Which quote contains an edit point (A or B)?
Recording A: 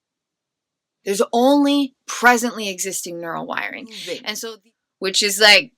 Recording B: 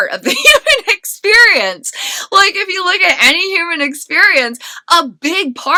A